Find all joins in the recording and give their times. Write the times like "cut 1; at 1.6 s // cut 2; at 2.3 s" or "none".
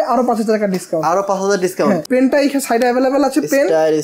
cut 1; at 2.0 s